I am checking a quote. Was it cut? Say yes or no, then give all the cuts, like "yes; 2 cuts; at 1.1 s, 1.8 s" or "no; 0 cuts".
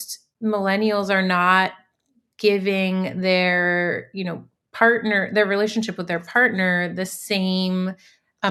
no; 0 cuts